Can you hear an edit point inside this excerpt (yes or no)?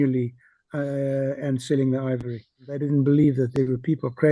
yes